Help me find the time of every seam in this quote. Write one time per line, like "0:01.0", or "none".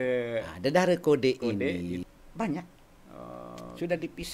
0:02.0